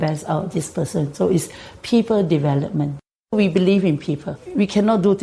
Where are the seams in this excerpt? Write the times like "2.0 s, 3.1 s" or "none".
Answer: 3.3 s, 4.4 s